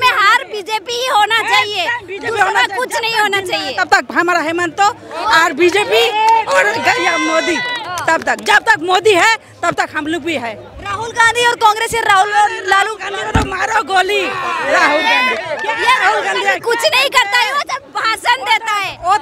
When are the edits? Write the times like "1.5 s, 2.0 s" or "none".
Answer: none